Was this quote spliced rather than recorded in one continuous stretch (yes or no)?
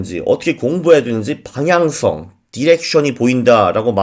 no